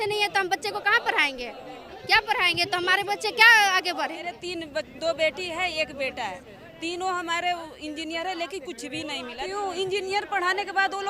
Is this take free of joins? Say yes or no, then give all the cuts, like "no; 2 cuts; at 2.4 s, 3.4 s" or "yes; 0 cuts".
no; 2 cuts; at 4.3 s, 9.4 s